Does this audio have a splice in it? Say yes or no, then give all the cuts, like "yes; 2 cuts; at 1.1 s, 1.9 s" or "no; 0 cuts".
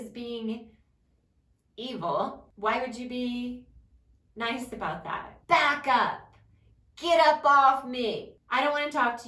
yes; 3 cuts; at 2.5 s, 5.3 s, 8.3 s